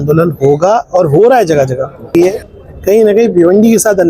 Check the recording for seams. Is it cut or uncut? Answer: cut